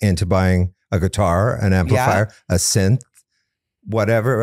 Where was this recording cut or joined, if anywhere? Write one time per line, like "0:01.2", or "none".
none